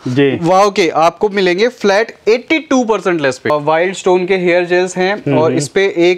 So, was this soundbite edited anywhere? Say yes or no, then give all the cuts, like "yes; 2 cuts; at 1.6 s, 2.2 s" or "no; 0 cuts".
yes; 1 cut; at 3.5 s